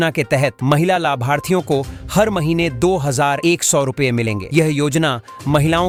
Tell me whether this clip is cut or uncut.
uncut